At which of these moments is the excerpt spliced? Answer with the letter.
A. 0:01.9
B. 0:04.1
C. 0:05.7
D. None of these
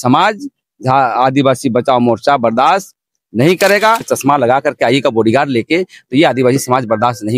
B